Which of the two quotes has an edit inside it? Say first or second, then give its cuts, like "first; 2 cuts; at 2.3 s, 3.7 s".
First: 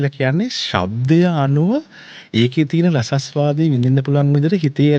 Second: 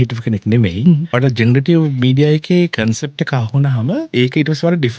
second; 2 cuts; at 1.1 s, 4.1 s